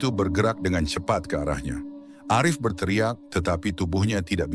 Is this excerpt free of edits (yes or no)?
yes